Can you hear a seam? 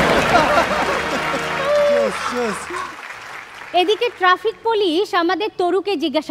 yes; 1 cut; at 3.0 s

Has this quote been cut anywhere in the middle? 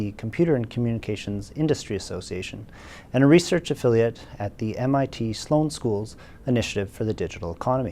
yes; 1 cut; at 3.3 s

